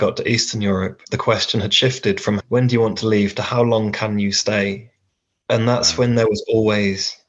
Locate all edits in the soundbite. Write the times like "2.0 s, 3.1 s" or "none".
1.0 s